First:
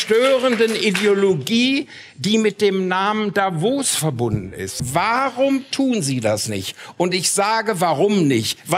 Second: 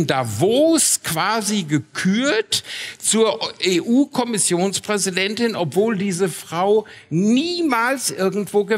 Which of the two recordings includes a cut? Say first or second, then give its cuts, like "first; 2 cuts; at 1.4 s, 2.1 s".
first; 1 cut; at 4.8 s